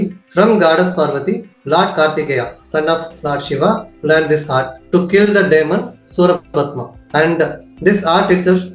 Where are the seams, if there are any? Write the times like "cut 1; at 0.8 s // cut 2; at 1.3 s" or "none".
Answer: cut 1; at 6.9 s

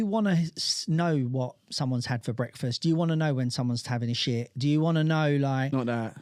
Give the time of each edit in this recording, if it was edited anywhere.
none

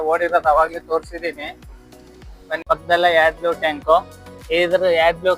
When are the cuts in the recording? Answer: cut 1; at 2.6 s

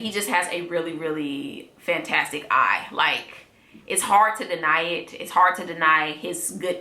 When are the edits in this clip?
none

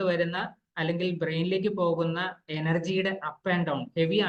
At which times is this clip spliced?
none

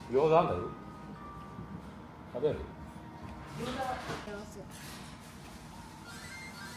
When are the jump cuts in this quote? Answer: none

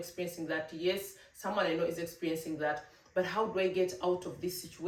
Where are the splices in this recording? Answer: none

